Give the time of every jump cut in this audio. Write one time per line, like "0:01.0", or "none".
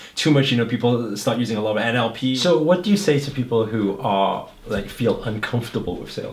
0:02.3